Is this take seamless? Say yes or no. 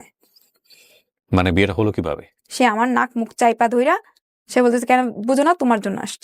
no